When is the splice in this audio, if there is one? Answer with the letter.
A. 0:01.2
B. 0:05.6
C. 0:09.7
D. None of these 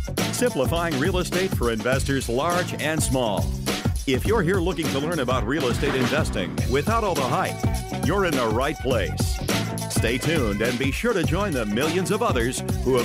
D